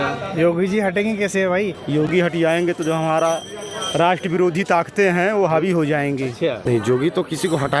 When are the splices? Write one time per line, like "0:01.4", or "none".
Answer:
0:01.8
0:06.7